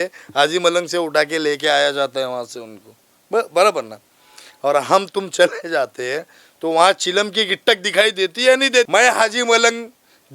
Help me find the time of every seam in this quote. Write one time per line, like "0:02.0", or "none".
0:08.9